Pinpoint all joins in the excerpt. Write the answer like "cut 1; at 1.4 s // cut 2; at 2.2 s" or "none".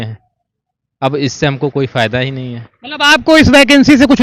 none